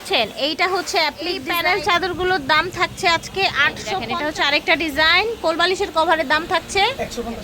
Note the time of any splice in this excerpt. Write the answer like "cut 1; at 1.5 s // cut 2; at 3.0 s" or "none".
cut 1; at 1.5 s // cut 2; at 4.1 s